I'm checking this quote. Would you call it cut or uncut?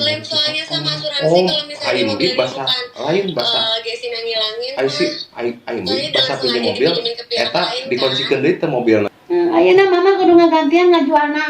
cut